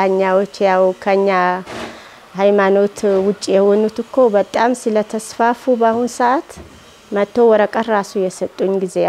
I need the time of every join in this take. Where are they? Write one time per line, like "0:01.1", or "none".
none